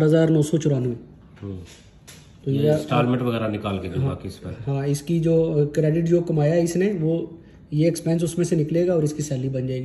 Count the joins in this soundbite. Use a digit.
0